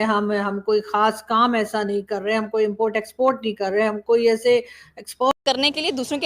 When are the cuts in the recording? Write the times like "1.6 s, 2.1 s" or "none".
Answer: 5.3 s